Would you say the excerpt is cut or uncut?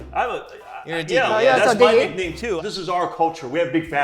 cut